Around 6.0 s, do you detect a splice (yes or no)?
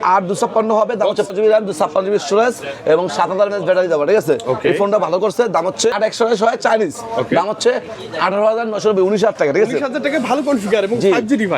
yes